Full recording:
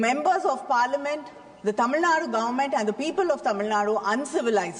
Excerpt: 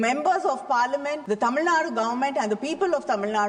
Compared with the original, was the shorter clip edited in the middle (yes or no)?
yes